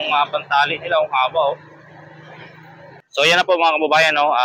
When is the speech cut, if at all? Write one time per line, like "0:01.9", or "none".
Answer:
0:03.0